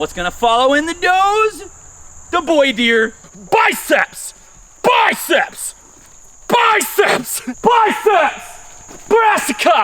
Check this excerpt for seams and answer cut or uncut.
cut